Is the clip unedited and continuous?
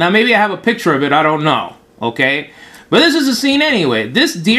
no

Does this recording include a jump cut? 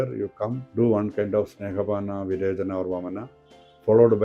no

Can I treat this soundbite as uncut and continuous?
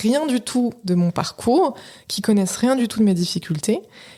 yes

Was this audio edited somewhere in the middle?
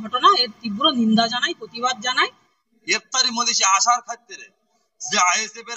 yes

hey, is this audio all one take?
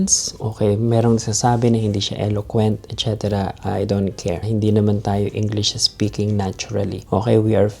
no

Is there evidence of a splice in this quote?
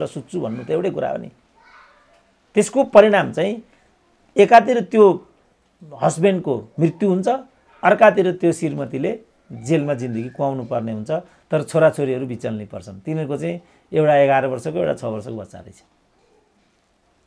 no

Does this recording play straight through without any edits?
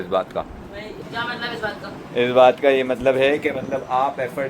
no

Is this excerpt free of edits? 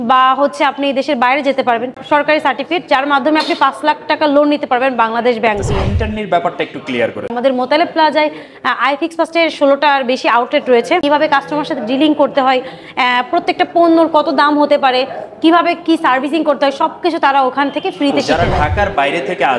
no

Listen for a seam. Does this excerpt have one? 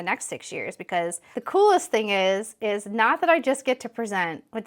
yes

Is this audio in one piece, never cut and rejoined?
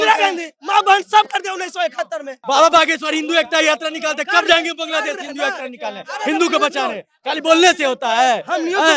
no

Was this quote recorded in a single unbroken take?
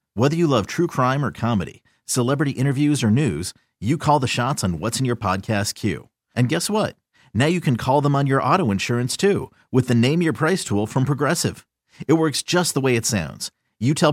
yes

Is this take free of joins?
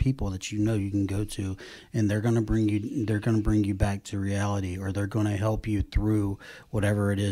yes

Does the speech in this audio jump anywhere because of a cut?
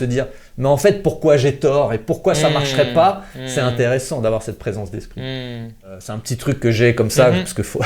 yes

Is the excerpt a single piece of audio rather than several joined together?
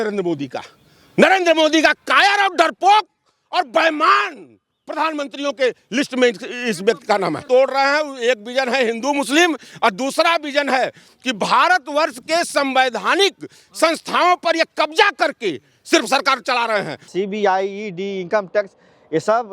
no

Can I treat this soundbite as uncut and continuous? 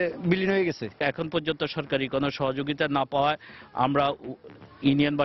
no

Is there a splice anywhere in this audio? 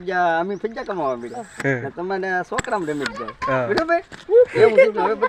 no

